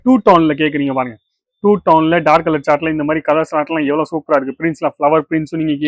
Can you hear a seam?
no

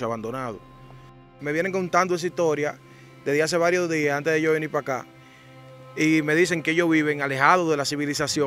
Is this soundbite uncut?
no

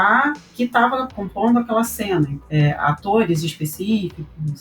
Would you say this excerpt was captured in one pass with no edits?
no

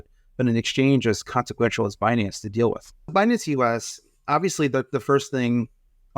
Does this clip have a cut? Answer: yes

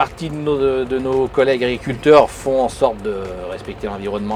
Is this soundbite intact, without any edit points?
yes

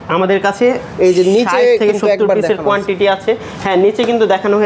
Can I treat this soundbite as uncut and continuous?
yes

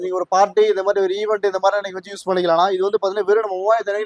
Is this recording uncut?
yes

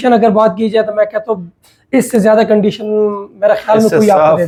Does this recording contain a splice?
no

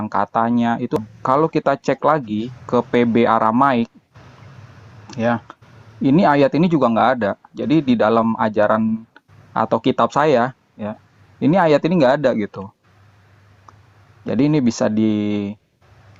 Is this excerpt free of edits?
no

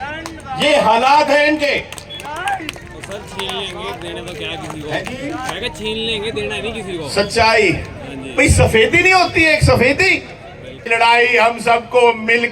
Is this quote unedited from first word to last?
no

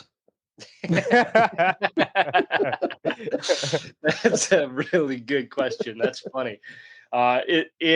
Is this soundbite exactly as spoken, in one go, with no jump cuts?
yes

